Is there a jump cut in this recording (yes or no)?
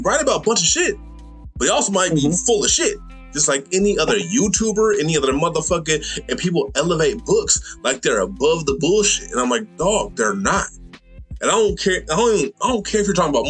no